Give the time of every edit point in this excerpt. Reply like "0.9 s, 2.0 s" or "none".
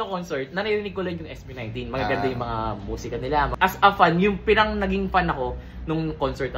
3.5 s